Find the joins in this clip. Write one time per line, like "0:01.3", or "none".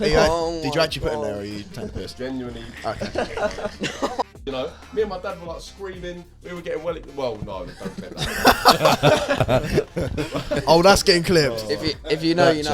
0:04.3